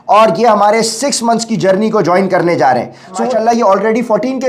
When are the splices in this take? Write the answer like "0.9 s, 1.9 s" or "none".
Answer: 3.3 s